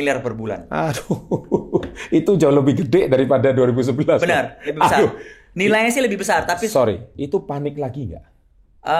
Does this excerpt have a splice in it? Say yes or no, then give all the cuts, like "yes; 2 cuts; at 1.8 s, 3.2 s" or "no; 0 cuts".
no; 0 cuts